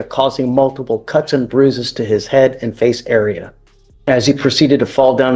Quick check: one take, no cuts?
yes; 0 cuts

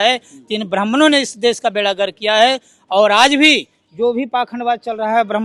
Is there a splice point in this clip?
no; 0 cuts

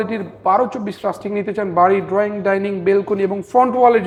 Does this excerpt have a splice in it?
no; 0 cuts

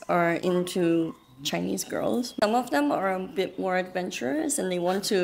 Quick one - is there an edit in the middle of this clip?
yes; 1 cut; at 2.4 s

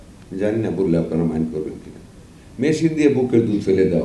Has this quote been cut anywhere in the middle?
no; 0 cuts

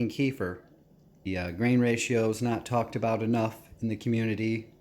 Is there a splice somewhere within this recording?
yes; 1 cut; at 1.3 s

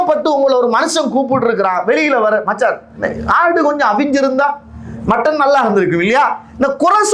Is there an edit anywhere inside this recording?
no; 0 cuts

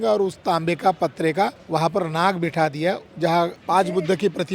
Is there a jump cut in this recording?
no; 0 cuts

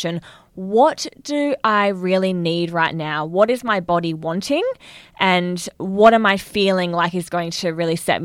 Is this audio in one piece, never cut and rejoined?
yes; 0 cuts

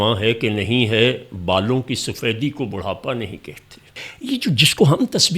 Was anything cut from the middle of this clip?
yes; 1 cut; at 4.1 s

